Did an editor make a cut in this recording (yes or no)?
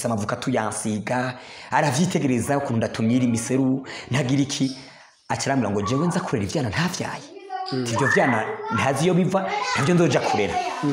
no